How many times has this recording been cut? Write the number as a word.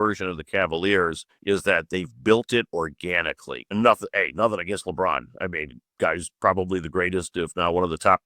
two